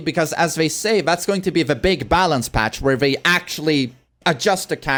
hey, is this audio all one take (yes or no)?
yes